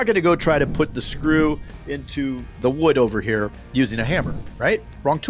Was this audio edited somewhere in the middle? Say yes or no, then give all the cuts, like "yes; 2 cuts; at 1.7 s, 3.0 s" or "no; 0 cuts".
no; 0 cuts